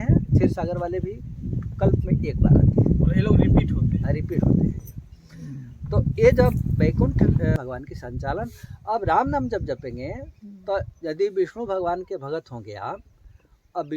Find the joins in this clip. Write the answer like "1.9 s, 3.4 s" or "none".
7.5 s